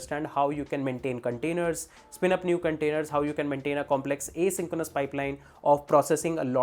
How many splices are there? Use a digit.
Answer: 0